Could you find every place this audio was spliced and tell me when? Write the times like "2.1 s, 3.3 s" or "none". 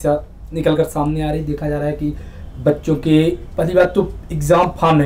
none